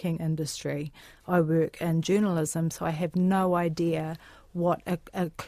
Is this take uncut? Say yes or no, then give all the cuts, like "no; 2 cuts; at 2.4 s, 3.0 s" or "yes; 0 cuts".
yes; 0 cuts